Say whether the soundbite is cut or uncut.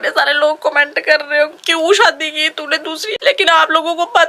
cut